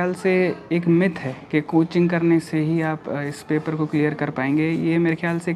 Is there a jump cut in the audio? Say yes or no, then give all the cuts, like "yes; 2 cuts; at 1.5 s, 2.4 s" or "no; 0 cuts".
no; 0 cuts